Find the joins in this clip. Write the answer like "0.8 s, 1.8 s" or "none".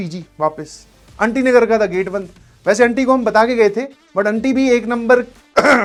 none